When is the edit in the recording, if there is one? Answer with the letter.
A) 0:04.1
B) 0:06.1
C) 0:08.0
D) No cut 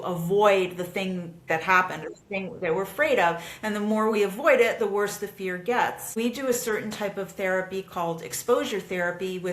B